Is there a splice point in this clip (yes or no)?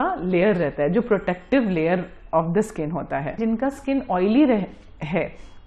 yes